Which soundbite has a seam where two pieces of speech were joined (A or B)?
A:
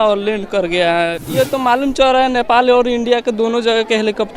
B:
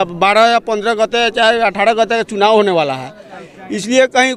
A